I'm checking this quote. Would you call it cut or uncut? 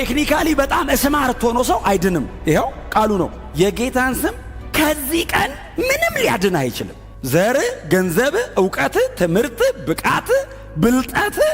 uncut